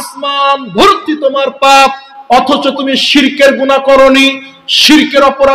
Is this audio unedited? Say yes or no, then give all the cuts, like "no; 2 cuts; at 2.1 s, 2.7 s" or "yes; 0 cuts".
yes; 0 cuts